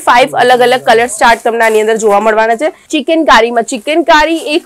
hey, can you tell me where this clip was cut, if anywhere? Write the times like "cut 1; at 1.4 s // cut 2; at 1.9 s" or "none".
cut 1; at 2.9 s